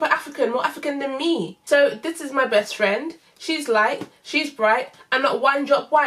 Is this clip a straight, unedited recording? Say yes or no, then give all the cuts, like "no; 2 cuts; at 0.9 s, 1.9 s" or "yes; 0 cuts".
no; 1 cut; at 1.5 s